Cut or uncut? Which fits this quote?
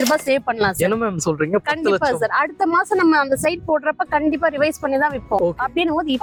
uncut